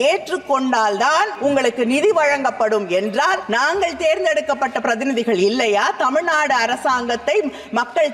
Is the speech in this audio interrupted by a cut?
yes; 2 cuts; at 1.3 s, 3.4 s

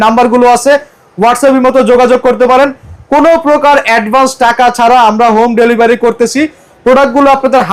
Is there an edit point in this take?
no; 0 cuts

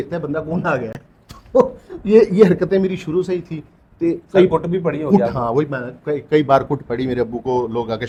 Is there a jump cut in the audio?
no; 0 cuts

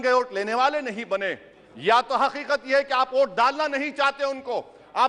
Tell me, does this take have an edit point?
no; 0 cuts

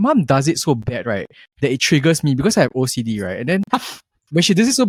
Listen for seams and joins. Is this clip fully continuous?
yes; 0 cuts

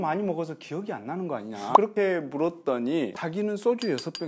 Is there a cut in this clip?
yes; 2 cuts; at 1.7 s, 3.2 s

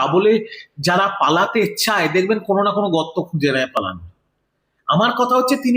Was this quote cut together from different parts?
no; 0 cuts

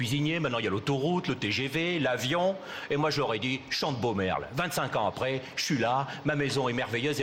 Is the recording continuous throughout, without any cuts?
yes; 0 cuts

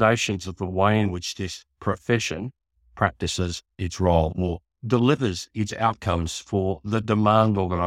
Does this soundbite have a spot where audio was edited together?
no; 0 cuts

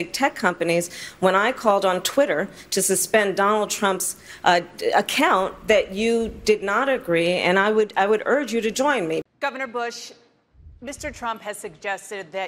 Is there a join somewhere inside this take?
yes; 1 cut; at 9.2 s

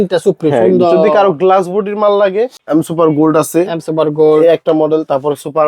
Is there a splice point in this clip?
yes; 1 cut; at 2.6 s

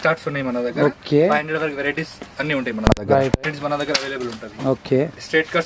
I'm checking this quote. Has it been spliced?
yes; 1 cut; at 3.4 s

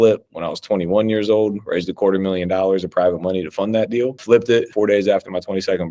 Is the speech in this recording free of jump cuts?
no; 2 cuts; at 4.2 s, 4.7 s

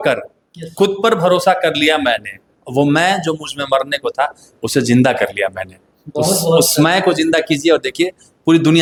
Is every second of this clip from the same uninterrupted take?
yes; 0 cuts

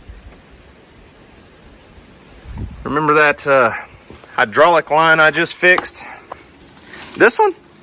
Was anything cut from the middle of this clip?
no; 0 cuts

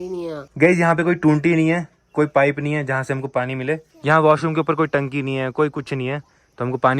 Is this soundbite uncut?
no; 1 cut; at 3.9 s

